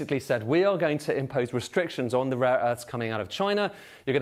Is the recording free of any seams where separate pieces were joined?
yes; 0 cuts

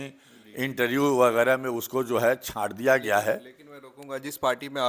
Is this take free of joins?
yes; 0 cuts

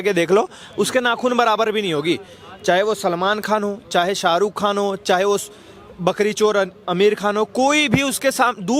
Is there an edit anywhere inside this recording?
no; 0 cuts

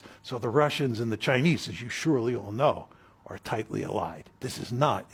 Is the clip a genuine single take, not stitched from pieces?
yes; 0 cuts

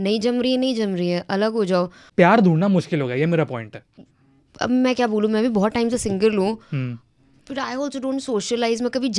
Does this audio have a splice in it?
no; 0 cuts

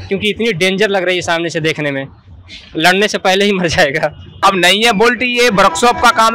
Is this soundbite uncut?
no; 1 cut; at 4.4 s

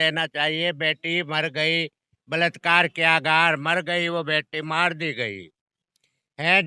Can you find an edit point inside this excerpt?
no; 0 cuts

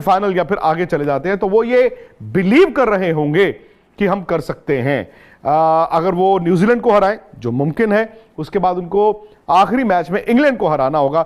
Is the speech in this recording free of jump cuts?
yes; 0 cuts

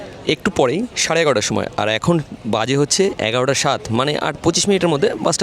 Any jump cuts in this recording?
no; 0 cuts

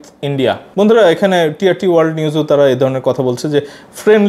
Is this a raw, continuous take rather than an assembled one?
yes; 0 cuts

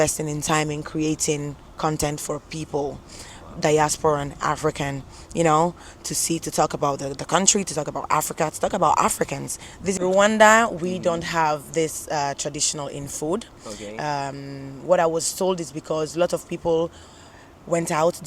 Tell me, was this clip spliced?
yes; 1 cut; at 10.0 s

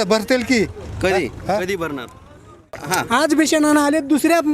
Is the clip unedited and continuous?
no; 1 cut; at 2.8 s

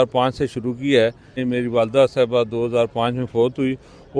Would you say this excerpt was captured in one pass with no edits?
no; 1 cut; at 1.4 s

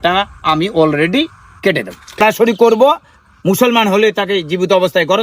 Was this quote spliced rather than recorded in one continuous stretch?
yes; 1 cut; at 2.2 s

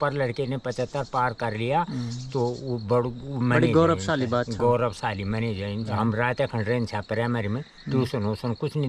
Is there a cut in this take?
yes; 1 cut; at 5.9 s

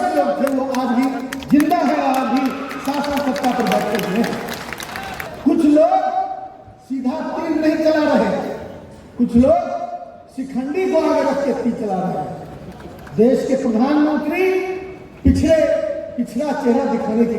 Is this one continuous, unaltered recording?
no; 1 cut; at 5.3 s

